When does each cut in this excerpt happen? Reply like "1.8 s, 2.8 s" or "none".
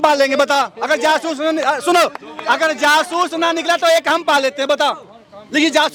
none